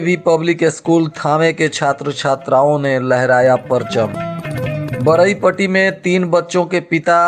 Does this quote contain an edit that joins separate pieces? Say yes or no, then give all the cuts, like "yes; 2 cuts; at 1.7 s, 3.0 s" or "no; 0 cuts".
no; 0 cuts